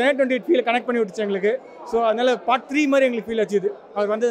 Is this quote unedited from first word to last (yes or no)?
yes